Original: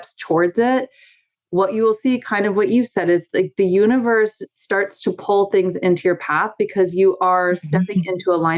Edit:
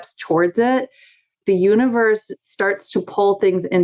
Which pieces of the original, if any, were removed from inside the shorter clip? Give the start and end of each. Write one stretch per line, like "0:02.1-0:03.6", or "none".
0:01.4-0:03.5